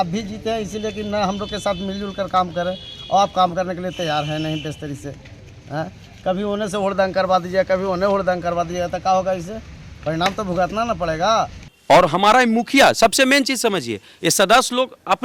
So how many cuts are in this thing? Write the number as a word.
one